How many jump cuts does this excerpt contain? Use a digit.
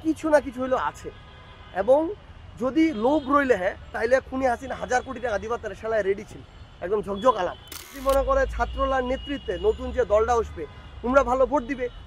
1